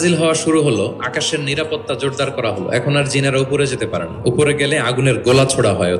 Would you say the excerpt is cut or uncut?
uncut